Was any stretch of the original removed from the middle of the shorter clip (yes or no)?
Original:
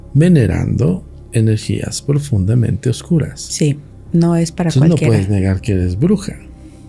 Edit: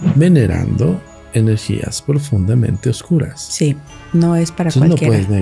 no